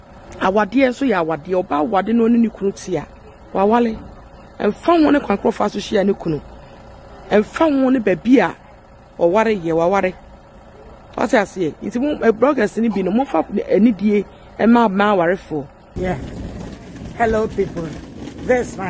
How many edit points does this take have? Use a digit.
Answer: 1